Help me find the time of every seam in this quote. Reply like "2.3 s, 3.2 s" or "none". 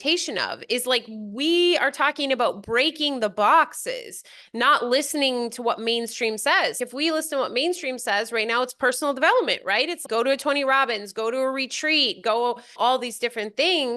6.8 s, 10.0 s, 12.8 s